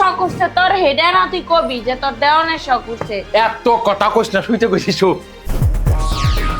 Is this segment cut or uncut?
uncut